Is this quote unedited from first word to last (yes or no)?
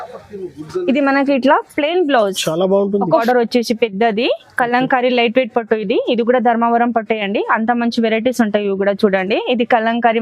no